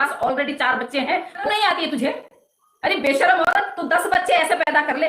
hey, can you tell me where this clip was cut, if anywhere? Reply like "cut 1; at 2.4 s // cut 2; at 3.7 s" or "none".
cut 1; at 1.5 s